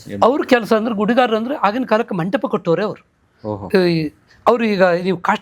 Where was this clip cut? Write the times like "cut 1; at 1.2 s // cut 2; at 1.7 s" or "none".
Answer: none